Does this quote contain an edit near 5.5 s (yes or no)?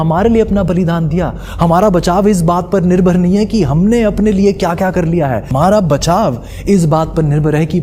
yes